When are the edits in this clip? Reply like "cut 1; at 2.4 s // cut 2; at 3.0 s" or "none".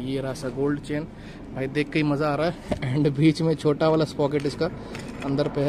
none

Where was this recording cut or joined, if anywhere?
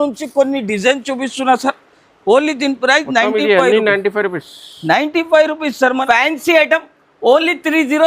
cut 1; at 6.0 s

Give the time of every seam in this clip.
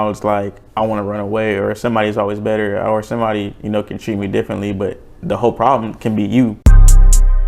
cut 1; at 6.6 s

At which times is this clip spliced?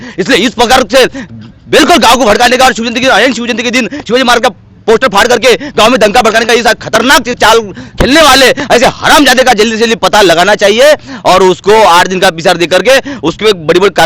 none

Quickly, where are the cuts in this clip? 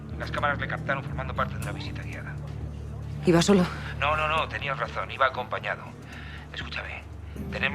cut 1; at 2.8 s

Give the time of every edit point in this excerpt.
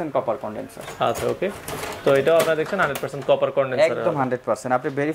none

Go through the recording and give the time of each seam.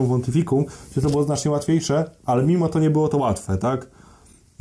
none

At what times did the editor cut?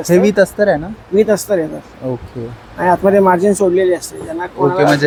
none

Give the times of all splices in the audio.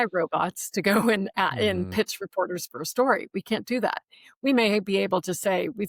none

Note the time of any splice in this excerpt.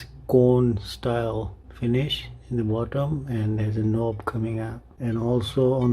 cut 1; at 1.6 s // cut 2; at 4.8 s

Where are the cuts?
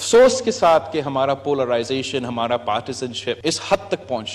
cut 1; at 3.4 s

